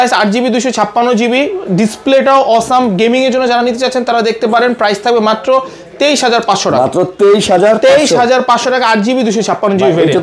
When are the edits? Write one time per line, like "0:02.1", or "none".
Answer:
none